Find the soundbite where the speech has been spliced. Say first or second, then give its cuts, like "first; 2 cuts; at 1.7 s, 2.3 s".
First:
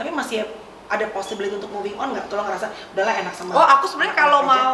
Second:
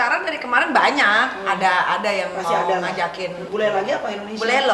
second; 1 cut; at 3.4 s